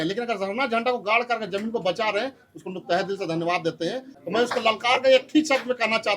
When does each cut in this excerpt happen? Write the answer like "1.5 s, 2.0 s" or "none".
4.2 s